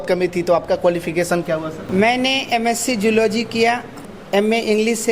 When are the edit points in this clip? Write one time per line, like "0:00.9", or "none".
0:01.8
0:04.1